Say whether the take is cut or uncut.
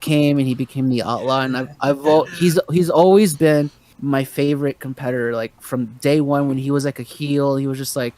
cut